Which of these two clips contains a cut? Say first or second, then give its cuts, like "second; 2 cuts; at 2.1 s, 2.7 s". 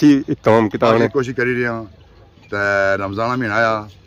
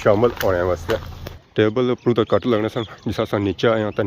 second; 1 cut; at 1.1 s